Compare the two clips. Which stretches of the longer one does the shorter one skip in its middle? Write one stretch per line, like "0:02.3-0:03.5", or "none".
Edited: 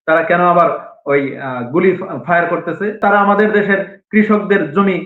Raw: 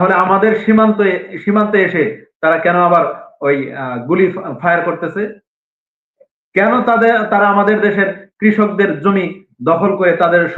0:05.3-0:07.3